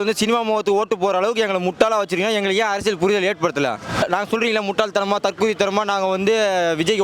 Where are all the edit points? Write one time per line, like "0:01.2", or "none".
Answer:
0:04.0